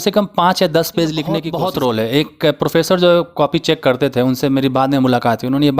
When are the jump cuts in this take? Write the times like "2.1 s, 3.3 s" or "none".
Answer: 1.5 s